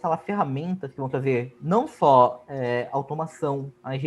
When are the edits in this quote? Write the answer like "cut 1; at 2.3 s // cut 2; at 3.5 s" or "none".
none